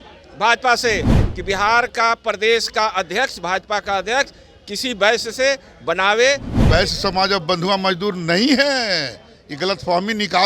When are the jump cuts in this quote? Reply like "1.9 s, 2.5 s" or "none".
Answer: 6.5 s

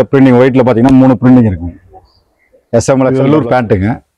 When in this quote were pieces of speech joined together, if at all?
3.2 s

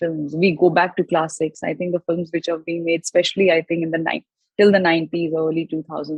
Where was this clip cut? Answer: none

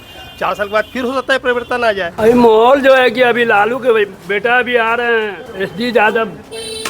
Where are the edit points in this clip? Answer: 2.1 s

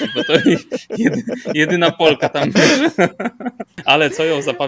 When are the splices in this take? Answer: 3.7 s

